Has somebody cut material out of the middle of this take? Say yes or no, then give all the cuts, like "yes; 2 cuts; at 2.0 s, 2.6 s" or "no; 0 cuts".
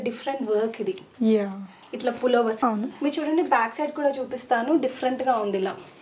yes; 1 cut; at 2.6 s